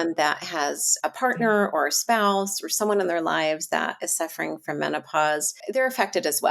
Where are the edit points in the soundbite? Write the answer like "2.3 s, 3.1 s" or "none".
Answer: 0.9 s, 5.6 s